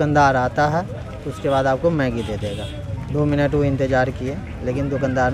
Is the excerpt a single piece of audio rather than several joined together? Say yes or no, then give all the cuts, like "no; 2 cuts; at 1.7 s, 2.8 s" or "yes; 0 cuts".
yes; 0 cuts